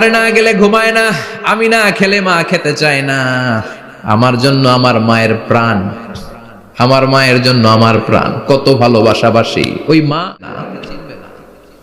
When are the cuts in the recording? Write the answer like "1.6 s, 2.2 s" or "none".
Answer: 10.4 s

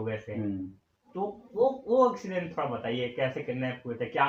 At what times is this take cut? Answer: none

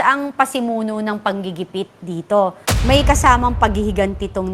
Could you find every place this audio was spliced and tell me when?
2.6 s

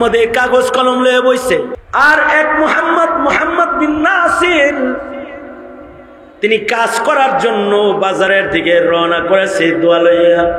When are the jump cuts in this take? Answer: 1.8 s

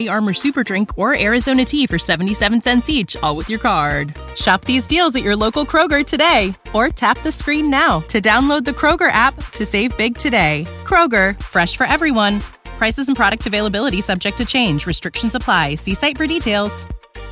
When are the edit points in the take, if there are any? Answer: none

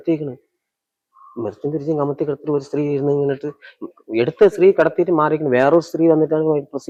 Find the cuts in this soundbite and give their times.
none

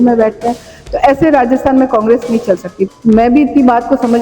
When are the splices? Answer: 2.7 s

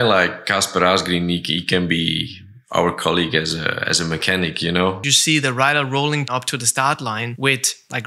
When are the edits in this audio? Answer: 5.0 s

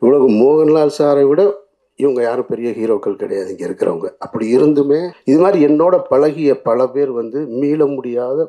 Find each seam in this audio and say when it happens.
5.1 s

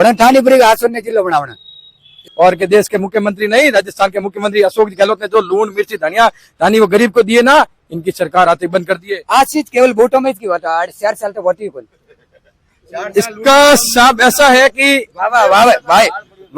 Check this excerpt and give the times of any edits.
2.2 s

